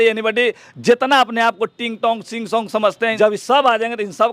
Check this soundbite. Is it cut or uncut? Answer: cut